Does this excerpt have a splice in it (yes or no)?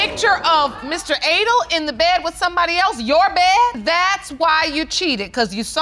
yes